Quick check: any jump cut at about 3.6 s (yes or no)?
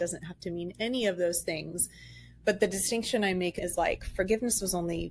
yes